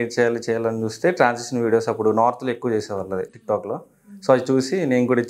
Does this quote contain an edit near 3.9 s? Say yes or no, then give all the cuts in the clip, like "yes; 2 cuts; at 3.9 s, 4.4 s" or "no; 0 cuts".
no; 0 cuts